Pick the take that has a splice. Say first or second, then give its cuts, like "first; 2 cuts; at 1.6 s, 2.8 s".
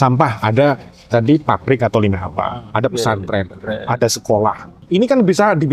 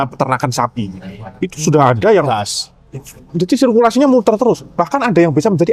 first; 1 cut; at 4.7 s